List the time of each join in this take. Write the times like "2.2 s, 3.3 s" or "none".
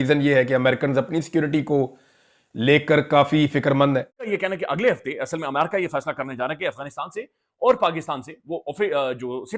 4.3 s